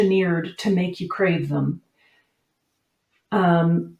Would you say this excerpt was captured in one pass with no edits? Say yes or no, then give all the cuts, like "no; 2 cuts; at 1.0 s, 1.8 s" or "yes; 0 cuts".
yes; 0 cuts